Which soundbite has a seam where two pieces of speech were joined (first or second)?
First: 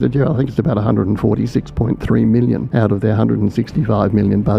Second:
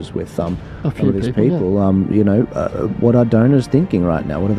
first